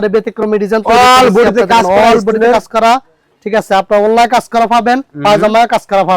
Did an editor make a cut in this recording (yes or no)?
no